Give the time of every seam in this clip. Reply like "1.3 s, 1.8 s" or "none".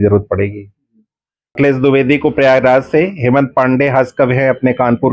1.5 s